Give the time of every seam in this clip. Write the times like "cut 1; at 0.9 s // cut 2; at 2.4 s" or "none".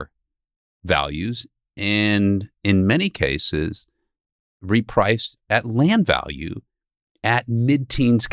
none